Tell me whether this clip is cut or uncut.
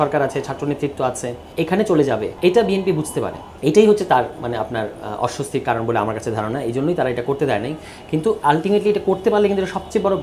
cut